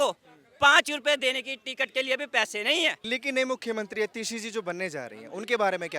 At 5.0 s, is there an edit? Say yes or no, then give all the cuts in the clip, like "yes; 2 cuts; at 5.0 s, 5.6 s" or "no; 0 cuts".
no; 1 cut; at 3.0 s